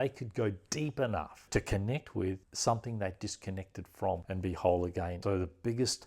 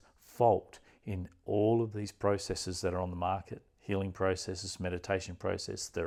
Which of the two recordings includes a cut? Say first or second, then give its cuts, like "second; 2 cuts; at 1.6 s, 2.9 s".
first; 3 cuts; at 2.5 s, 4.2 s, 5.2 s